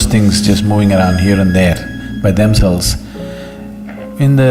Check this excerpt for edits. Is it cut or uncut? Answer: uncut